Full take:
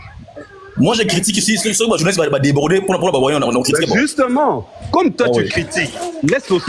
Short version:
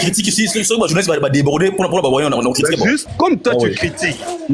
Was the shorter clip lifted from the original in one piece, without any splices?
no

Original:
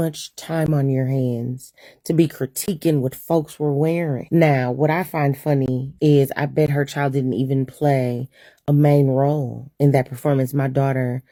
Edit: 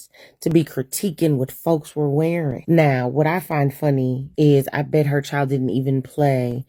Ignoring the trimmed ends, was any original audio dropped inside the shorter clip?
no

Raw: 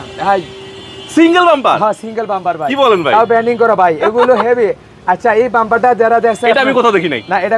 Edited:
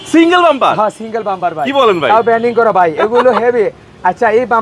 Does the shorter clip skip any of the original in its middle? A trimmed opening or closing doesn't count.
no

